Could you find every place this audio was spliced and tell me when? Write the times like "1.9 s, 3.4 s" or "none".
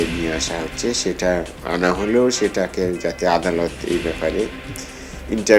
1.6 s